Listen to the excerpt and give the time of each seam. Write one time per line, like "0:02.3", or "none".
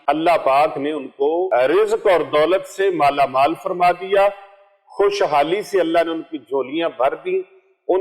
0:01.5